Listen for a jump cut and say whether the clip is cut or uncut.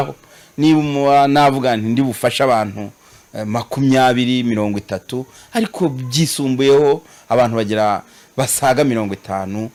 uncut